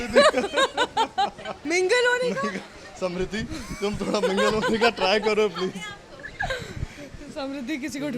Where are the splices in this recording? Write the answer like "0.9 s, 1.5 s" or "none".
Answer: 1.5 s